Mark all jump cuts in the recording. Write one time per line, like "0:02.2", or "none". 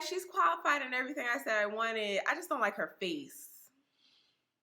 none